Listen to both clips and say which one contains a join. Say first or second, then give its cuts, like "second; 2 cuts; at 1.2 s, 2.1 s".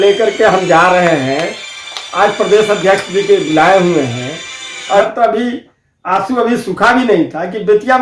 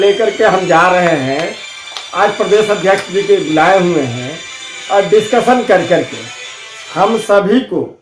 first; 1 cut; at 5.1 s